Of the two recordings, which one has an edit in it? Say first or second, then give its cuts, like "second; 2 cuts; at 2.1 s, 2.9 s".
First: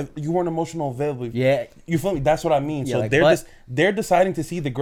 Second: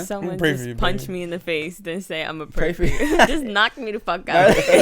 second; 1 cut; at 3.3 s